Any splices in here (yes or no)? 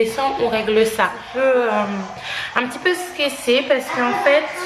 yes